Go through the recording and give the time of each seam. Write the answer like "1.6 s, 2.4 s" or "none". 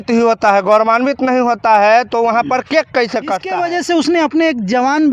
3.4 s